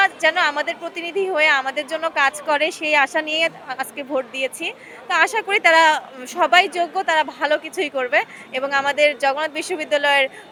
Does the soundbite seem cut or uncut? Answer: uncut